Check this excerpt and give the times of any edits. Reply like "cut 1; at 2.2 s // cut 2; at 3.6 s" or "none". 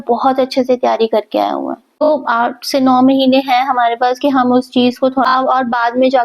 cut 1; at 1.8 s // cut 2; at 5.3 s